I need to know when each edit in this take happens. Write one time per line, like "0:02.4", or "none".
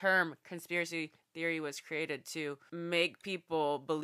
0:02.6